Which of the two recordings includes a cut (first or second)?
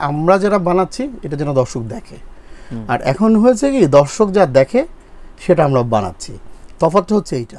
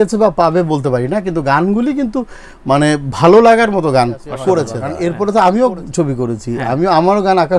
second